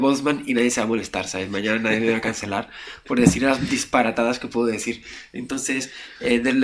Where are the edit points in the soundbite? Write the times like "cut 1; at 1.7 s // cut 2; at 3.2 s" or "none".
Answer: none